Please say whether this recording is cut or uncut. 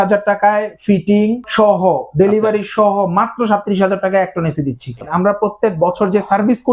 cut